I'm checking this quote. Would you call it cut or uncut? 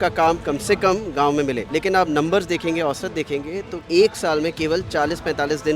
cut